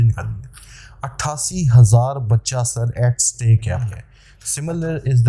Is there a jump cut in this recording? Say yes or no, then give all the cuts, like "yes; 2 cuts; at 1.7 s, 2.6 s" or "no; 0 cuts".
yes; 1 cut; at 4.1 s